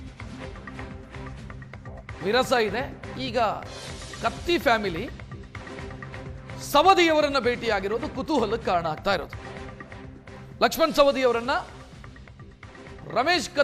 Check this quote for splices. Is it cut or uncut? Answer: cut